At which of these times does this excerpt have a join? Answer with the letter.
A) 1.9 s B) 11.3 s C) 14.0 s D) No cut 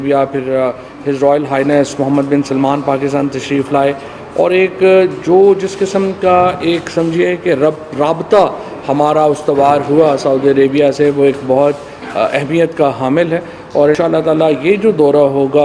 C